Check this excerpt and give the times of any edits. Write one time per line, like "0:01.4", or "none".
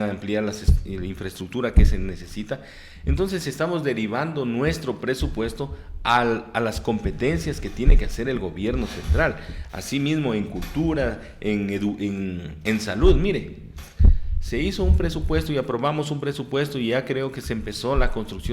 none